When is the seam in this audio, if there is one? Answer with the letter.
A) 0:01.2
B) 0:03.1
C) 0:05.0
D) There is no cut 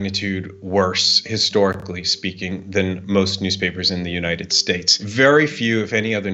C